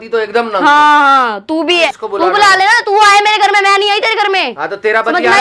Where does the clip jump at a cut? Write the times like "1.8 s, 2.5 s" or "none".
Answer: 1.9 s